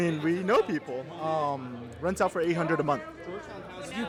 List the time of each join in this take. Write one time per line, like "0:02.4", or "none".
none